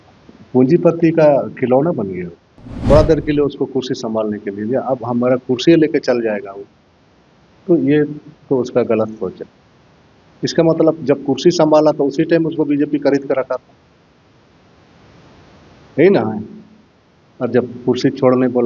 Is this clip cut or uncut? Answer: cut